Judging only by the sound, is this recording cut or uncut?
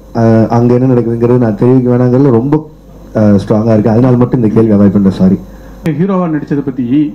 cut